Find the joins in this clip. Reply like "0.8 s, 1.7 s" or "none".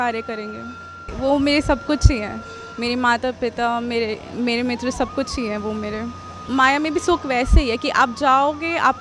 1.0 s, 6.4 s